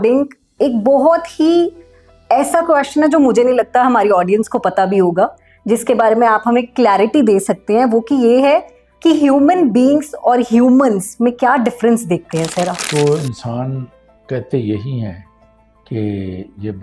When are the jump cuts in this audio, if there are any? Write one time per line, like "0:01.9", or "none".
0:12.8